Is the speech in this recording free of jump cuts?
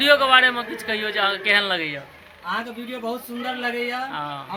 yes; 0 cuts

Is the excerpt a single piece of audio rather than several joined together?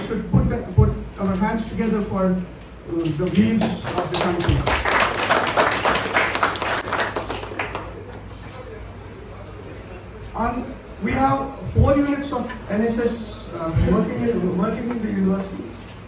yes; 0 cuts

